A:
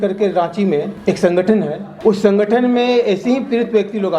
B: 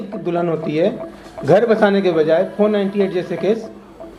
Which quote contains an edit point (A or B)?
A